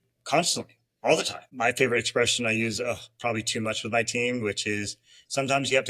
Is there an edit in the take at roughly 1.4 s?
yes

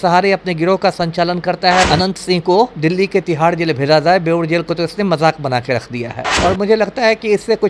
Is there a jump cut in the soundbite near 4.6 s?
no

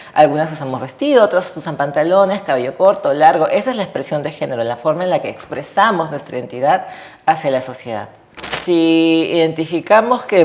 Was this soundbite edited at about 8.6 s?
yes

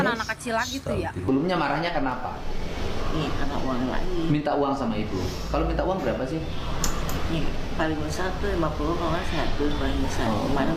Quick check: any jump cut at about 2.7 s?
no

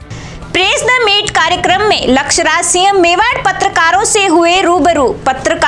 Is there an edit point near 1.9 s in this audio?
no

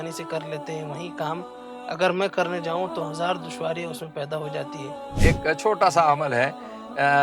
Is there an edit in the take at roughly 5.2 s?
yes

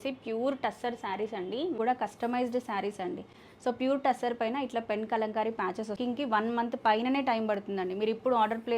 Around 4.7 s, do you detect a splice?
no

